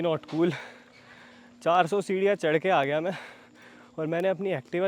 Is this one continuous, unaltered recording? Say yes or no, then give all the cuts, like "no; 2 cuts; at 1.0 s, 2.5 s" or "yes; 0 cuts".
yes; 0 cuts